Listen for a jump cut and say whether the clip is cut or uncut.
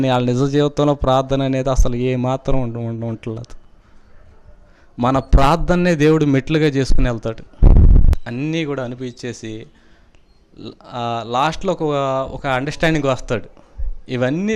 cut